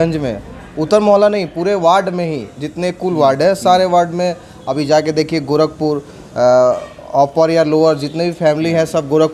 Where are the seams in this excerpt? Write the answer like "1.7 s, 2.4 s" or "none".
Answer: none